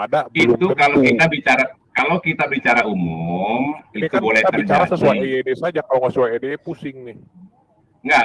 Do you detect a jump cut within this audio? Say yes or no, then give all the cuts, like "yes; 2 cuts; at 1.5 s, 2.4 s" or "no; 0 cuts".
no; 0 cuts